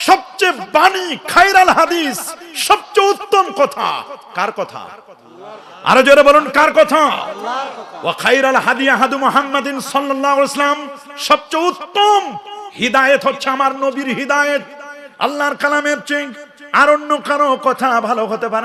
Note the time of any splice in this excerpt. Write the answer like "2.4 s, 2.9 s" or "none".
none